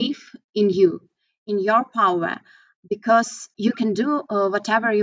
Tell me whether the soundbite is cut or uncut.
cut